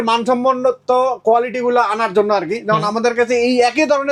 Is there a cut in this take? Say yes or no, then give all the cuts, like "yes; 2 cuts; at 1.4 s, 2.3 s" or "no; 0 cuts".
no; 0 cuts